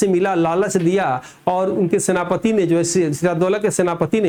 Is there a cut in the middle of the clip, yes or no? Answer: no